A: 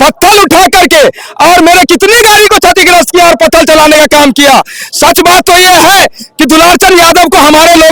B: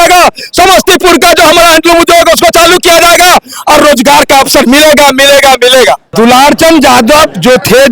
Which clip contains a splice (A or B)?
B